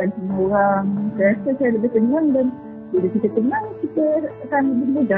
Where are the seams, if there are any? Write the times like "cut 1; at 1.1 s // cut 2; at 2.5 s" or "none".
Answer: none